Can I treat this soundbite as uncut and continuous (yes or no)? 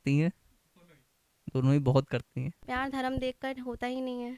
no